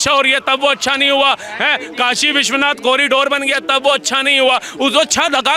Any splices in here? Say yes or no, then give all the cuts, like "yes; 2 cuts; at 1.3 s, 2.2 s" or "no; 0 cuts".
no; 0 cuts